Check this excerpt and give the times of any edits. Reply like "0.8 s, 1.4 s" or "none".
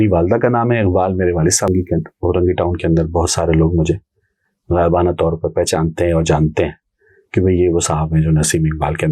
1.7 s